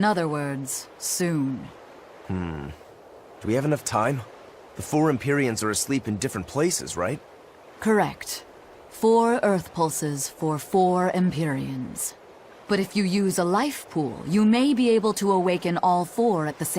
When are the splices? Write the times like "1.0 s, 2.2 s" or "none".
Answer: none